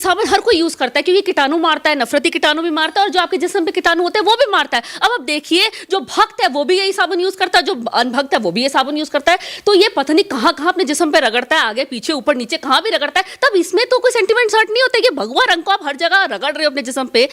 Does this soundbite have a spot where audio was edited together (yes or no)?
no